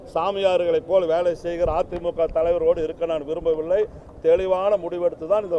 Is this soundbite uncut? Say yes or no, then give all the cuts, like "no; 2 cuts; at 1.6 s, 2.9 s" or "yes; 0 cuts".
yes; 0 cuts